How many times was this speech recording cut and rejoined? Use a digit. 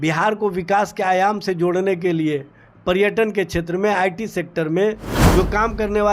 1